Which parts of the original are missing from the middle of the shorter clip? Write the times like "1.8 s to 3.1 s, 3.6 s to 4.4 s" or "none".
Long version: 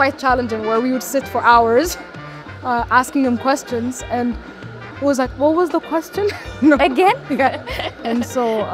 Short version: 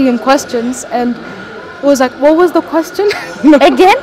none